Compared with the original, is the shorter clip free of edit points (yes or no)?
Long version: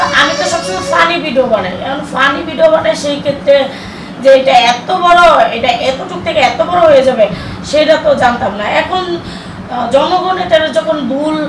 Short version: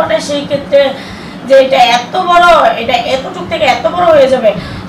yes